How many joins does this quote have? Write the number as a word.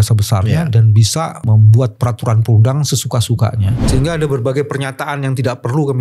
two